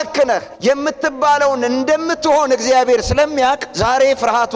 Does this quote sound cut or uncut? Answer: uncut